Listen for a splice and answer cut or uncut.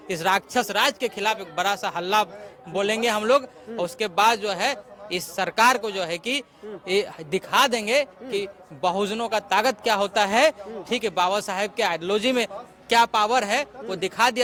uncut